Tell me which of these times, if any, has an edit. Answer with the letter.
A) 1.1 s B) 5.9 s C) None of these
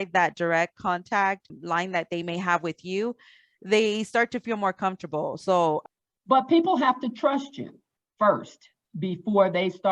B